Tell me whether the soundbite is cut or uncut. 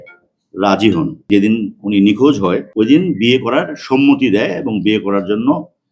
cut